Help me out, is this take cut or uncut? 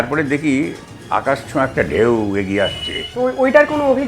cut